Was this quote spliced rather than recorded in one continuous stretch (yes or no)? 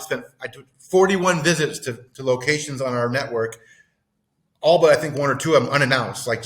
no